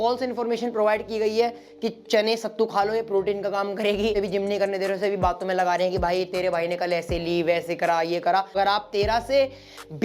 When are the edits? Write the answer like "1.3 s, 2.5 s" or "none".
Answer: 4.1 s, 8.5 s